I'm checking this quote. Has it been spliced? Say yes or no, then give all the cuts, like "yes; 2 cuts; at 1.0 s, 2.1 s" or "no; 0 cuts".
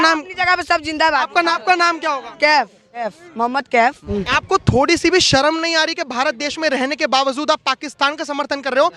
yes; 3 cuts; at 1.5 s, 3.1 s, 4.0 s